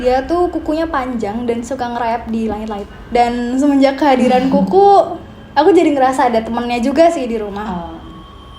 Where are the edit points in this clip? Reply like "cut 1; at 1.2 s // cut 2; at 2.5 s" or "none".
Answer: cut 1; at 2.9 s